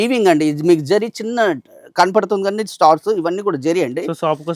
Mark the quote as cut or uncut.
uncut